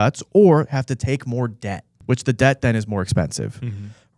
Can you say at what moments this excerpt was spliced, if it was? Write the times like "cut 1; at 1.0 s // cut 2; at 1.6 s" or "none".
cut 1; at 1.9 s

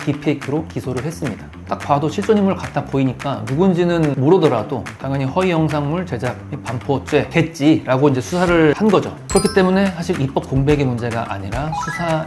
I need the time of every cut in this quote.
cut 1; at 1.6 s // cut 2; at 4.1 s // cut 3; at 7.3 s // cut 4; at 8.8 s

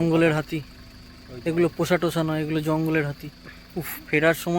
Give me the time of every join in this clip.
none

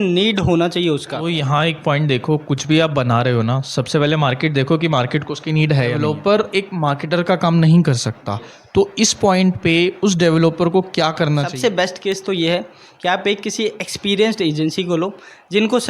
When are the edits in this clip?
cut 1; at 1.2 s // cut 2; at 6.0 s // cut 3; at 11.5 s

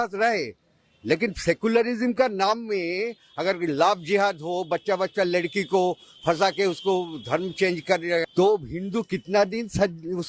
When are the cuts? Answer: cut 1; at 8.2 s

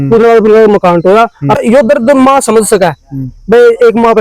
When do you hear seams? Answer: cut 1; at 1.6 s

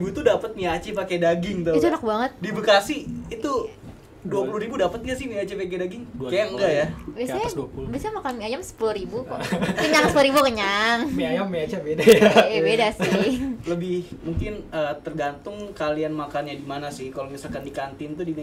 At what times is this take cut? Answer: none

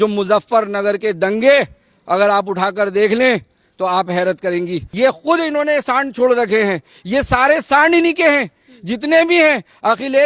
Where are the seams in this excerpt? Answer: cut 1; at 4.8 s

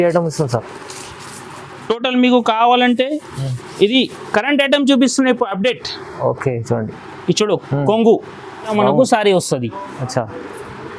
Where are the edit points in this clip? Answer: cut 1; at 8.7 s

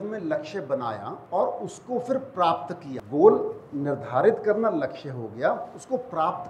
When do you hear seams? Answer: cut 1; at 1.1 s // cut 2; at 2.9 s

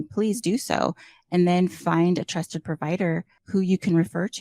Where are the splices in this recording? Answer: cut 1; at 3.3 s

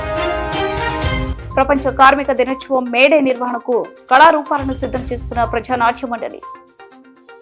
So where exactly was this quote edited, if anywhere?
none

